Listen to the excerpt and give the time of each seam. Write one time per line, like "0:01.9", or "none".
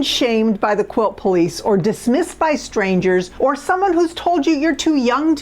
0:03.3

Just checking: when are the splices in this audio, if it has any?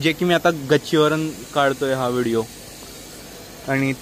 none

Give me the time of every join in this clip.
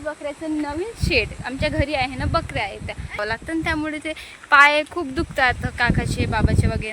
0:03.2

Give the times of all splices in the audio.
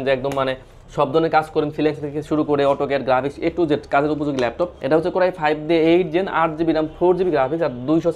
0:04.8

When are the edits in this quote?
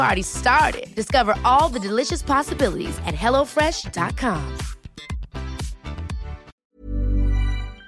0:06.6

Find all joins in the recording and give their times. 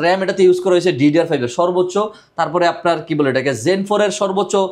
none

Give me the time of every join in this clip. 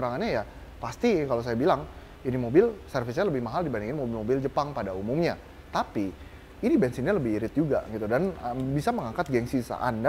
none

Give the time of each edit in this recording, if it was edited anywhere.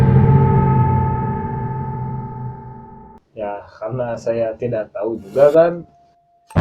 0:03.2

